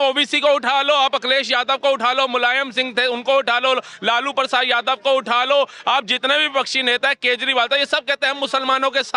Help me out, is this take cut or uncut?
uncut